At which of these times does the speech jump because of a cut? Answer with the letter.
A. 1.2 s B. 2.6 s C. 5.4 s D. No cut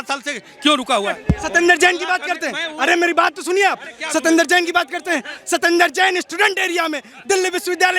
A